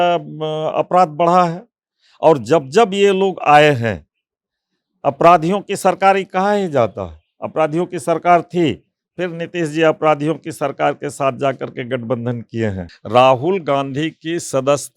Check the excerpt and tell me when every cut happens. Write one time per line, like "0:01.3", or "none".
0:12.9